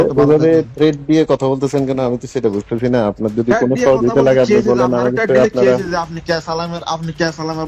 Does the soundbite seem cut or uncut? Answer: uncut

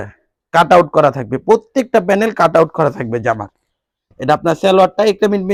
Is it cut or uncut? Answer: uncut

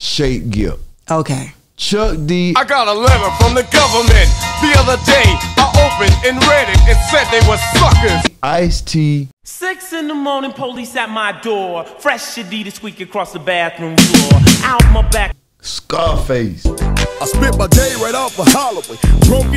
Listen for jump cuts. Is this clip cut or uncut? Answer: uncut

